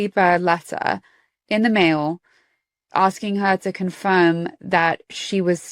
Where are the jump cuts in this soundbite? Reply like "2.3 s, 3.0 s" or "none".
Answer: 2.8 s